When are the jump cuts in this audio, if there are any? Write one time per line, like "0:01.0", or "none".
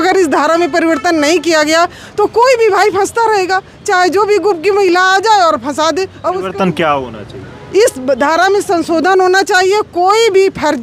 none